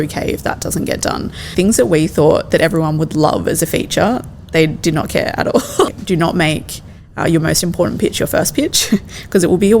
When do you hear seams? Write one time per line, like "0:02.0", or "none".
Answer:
0:01.5
0:05.9